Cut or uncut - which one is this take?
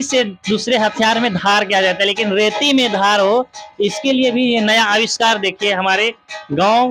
uncut